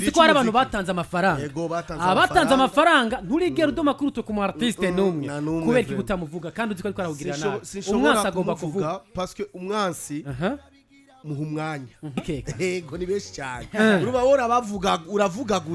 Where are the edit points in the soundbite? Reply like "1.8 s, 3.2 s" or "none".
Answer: 12.2 s